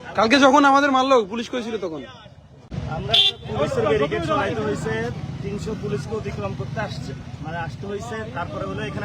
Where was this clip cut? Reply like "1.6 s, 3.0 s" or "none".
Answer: 2.7 s